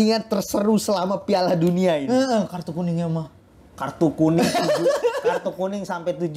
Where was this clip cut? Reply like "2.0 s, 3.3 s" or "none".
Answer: none